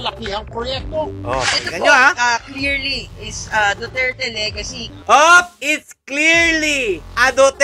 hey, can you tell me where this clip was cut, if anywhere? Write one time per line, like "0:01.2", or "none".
0:04.9